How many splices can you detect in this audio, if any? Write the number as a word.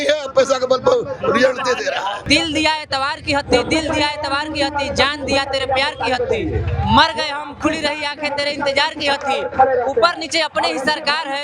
one